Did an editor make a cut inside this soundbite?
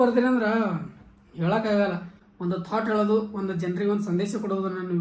yes; 1 cut; at 2.1 s

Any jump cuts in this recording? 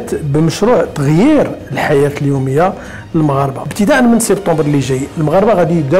yes; 1 cut; at 3.6 s

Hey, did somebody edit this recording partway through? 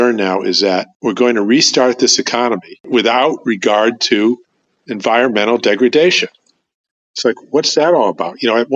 no; 0 cuts

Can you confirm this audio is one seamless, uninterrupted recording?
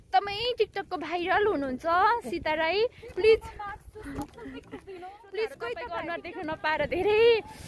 no; 1 cut; at 6.2 s

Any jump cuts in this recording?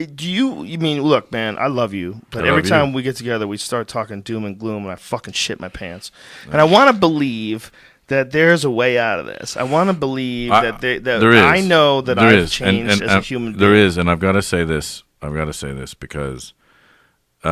no; 0 cuts

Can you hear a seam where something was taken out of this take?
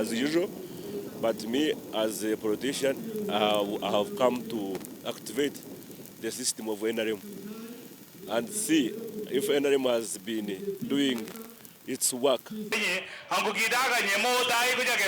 yes; 1 cut; at 12.7 s

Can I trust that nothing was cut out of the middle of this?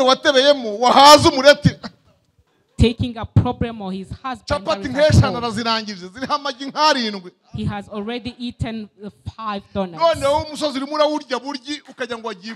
yes; 0 cuts

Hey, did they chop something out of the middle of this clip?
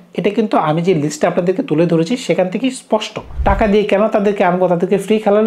yes; 1 cut; at 3.3 s

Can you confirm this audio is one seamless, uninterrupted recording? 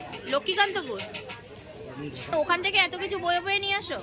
no; 1 cut; at 2.3 s

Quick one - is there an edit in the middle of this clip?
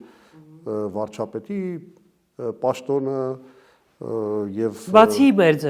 no; 0 cuts

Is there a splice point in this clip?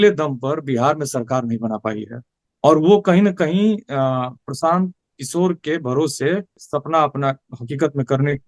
yes; 1 cut; at 6.7 s

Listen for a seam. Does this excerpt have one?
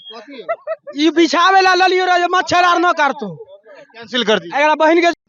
no; 0 cuts

